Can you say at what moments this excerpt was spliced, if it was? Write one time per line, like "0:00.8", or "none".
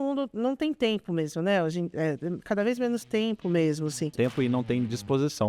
0:04.1